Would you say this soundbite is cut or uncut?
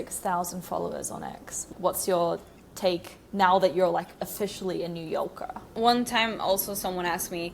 cut